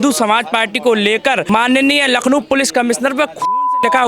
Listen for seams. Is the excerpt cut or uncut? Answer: cut